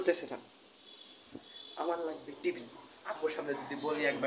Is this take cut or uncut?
uncut